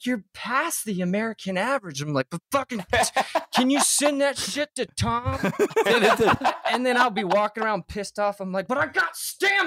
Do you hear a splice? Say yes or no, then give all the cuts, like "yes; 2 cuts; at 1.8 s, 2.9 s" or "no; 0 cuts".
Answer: yes; 1 cut; at 5.4 s